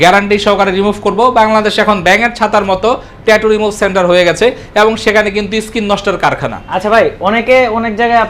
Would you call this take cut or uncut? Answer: uncut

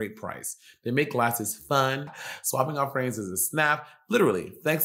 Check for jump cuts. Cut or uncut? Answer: cut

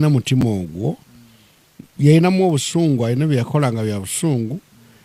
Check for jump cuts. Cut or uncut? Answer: uncut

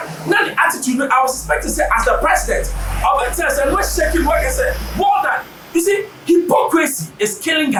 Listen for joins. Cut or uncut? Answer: uncut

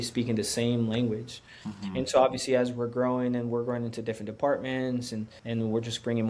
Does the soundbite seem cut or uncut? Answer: cut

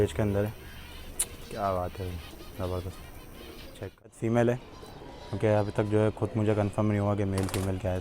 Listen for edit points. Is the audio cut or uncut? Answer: cut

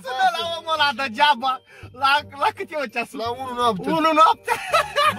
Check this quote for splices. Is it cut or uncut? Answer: uncut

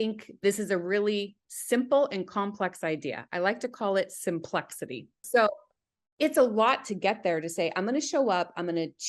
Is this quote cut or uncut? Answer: cut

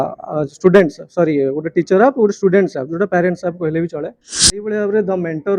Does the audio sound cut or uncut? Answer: cut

